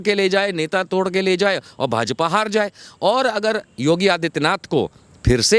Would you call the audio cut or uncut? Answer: uncut